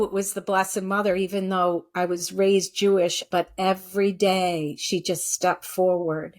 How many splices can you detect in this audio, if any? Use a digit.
1